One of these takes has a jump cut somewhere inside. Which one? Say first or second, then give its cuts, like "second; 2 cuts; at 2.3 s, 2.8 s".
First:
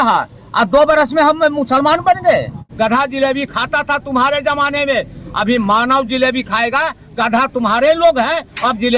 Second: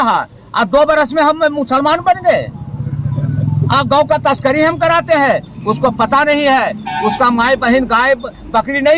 first; 1 cut; at 2.6 s